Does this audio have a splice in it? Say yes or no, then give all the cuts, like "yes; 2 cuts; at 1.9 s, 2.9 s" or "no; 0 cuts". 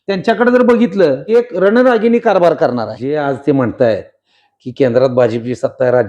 yes; 2 cuts; at 1.2 s, 3.1 s